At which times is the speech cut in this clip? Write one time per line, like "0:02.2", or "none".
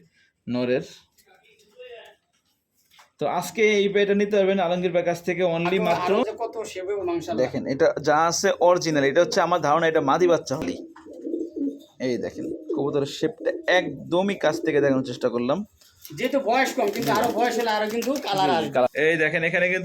0:06.2
0:10.6
0:18.9